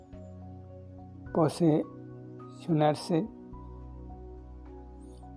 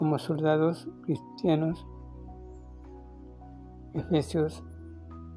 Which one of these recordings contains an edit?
first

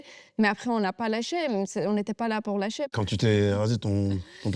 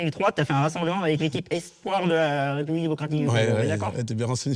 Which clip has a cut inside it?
first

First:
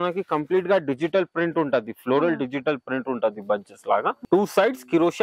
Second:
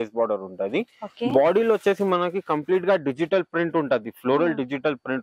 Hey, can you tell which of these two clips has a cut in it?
first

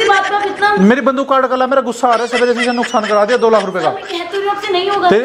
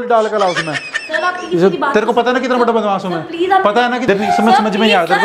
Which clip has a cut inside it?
second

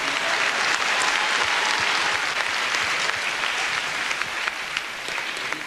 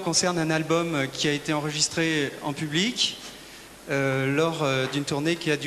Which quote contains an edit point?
second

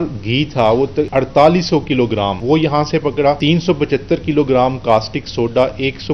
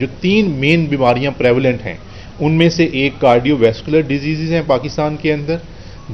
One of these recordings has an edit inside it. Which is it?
first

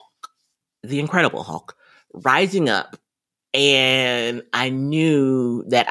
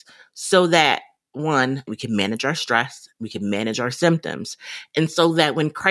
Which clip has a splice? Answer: second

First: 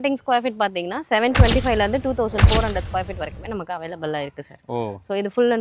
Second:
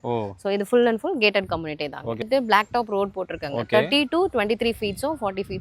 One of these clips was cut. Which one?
second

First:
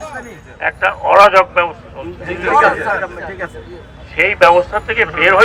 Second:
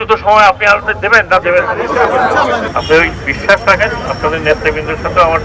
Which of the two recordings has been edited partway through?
second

